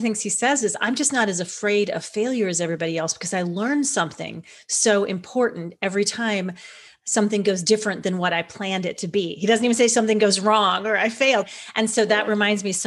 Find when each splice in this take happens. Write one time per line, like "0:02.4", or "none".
0:11.5